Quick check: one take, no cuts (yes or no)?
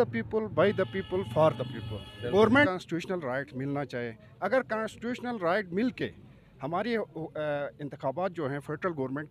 no